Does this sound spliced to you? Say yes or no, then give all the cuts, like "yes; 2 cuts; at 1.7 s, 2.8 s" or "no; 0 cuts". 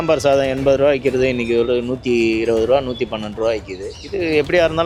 no; 0 cuts